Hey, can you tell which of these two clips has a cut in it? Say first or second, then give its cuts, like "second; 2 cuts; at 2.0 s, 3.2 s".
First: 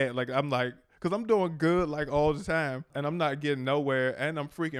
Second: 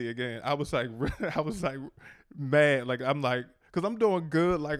first; 1 cut; at 3.0 s